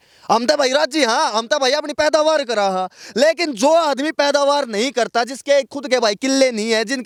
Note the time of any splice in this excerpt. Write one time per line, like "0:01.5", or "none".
none